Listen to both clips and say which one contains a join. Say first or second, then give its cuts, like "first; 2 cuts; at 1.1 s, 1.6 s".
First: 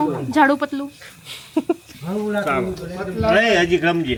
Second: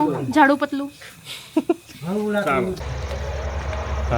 second; 1 cut; at 2.8 s